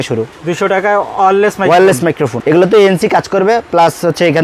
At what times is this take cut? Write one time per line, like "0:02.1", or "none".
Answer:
0:02.3

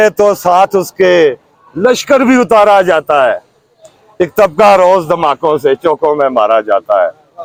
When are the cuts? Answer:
none

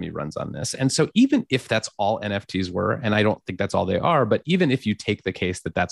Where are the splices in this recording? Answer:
none

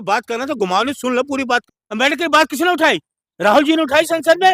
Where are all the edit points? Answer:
0:01.7

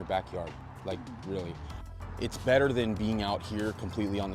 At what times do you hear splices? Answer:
none

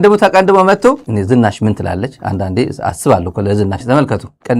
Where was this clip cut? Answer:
0:01.1

